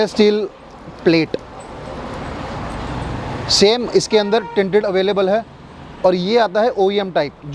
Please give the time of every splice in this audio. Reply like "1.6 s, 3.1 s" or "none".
none